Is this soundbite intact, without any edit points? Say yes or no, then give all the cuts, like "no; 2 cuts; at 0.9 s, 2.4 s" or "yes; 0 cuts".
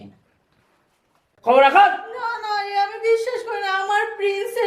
no; 1 cut; at 1.3 s